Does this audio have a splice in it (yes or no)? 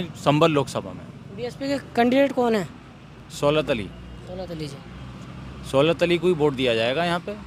no